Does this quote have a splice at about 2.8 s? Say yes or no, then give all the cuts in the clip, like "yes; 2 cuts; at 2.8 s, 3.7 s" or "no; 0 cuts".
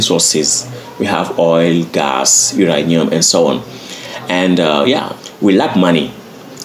no; 1 cut; at 5.2 s